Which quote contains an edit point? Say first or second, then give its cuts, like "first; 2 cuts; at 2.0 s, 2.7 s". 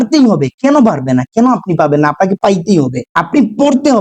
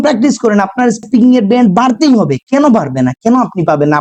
first; 1 cut; at 3.0 s